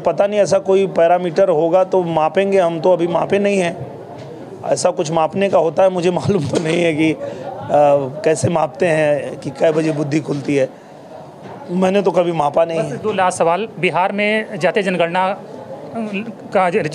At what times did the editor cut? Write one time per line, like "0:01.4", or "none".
none